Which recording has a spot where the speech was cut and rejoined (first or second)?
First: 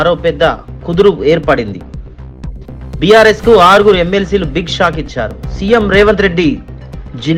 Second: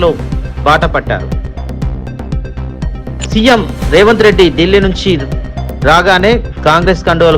second